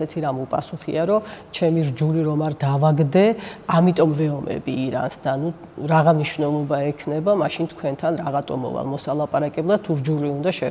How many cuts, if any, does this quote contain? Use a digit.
0